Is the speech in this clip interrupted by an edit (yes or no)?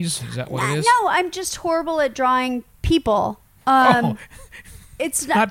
no